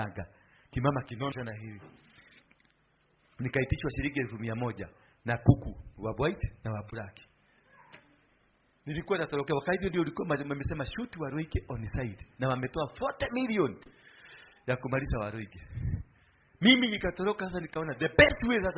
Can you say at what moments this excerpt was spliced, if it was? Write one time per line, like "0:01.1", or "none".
0:01.3